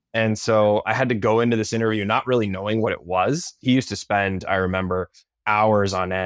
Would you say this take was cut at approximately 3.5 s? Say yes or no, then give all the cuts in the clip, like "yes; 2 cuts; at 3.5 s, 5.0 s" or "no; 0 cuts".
yes; 1 cut; at 3.5 s